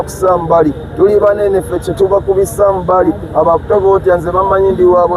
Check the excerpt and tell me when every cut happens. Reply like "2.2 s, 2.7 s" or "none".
none